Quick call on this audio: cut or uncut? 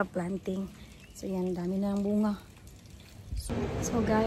cut